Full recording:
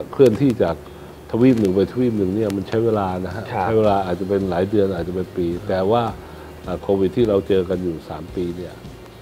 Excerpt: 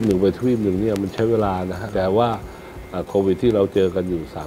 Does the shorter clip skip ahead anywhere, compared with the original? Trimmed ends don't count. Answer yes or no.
yes